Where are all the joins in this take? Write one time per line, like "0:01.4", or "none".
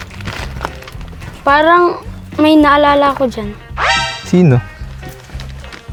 none